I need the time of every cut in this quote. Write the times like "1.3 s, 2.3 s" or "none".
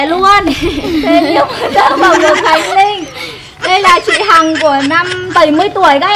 5.3 s